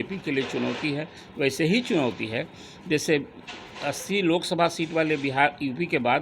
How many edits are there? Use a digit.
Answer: 0